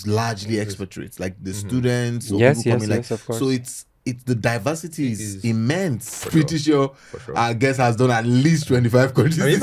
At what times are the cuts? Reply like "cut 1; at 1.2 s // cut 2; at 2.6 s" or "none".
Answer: cut 1; at 6.2 s